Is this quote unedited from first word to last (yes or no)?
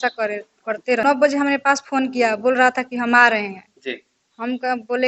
no